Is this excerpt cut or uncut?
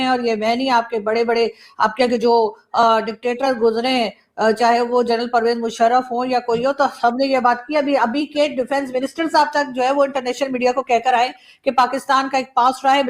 uncut